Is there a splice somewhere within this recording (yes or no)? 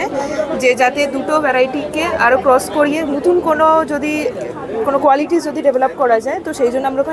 no